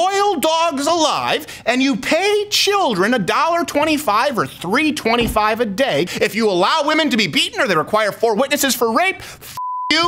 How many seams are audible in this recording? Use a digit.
1